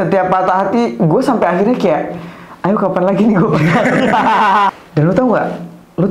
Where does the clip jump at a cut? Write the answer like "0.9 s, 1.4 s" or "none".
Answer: 4.7 s